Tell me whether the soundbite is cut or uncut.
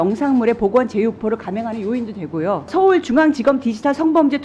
cut